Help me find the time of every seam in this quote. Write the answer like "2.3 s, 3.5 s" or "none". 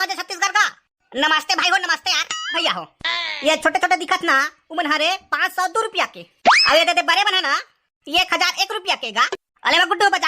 2.6 s, 9.3 s